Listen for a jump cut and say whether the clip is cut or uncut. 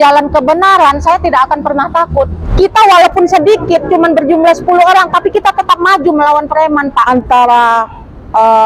cut